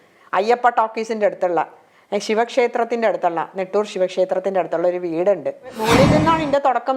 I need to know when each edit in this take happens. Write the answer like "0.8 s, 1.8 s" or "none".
5.8 s